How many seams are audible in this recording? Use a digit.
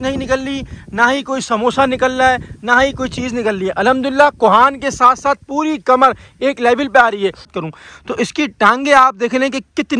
1